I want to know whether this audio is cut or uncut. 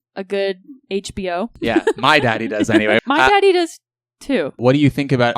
cut